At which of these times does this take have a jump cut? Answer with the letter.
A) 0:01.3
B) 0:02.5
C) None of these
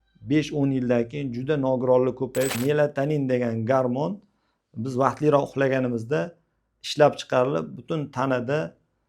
B